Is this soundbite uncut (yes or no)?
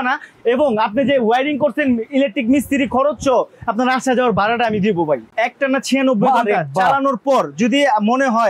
no